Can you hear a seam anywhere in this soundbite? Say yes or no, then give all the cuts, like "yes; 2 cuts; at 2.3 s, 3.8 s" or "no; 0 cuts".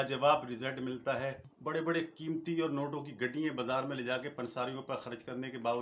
yes; 1 cut; at 1.5 s